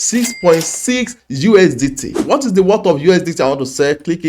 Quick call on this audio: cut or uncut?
cut